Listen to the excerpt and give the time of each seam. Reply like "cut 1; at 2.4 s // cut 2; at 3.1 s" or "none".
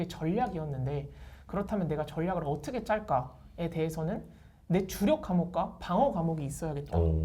none